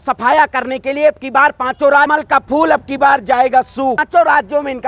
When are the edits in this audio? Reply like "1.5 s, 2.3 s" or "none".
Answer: 2.1 s, 4.0 s